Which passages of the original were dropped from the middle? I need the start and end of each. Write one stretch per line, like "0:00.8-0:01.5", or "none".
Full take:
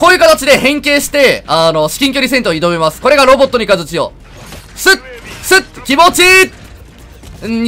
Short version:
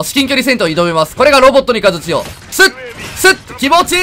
0:04.2-0:04.7